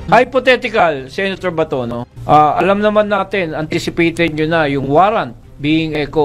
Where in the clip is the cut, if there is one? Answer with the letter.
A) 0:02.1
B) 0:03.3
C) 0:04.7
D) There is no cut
A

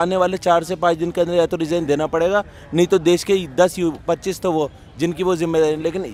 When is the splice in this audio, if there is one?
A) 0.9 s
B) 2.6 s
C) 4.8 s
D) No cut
D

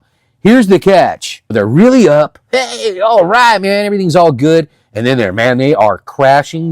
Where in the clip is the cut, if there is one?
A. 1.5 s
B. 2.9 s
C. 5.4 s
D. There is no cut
A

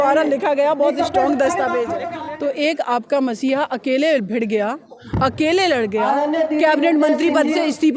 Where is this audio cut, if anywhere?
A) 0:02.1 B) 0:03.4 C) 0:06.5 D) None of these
A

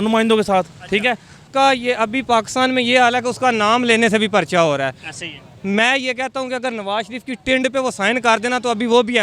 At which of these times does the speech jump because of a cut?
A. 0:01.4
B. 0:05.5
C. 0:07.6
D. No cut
A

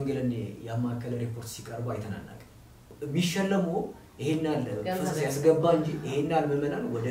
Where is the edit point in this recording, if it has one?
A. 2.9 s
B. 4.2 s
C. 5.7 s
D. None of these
A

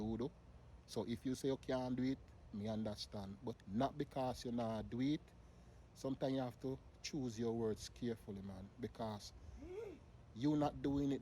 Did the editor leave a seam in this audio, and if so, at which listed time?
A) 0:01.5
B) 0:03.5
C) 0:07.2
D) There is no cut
B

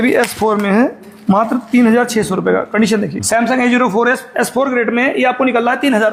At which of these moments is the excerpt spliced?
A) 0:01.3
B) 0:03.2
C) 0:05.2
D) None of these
B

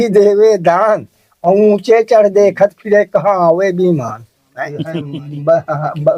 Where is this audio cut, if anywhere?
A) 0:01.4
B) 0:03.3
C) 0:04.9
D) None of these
C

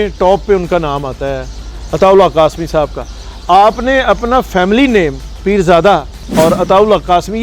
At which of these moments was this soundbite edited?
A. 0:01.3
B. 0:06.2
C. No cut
B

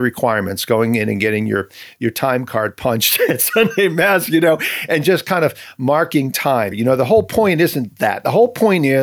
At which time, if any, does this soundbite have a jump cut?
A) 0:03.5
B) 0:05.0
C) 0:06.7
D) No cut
C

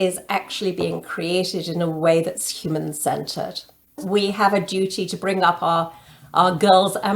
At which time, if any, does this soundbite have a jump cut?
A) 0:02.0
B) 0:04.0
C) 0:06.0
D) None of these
B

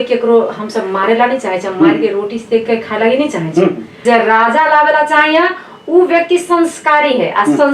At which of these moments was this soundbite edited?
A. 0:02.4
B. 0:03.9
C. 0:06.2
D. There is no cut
B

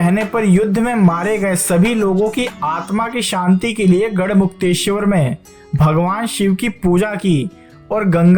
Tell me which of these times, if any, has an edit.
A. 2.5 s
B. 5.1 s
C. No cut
C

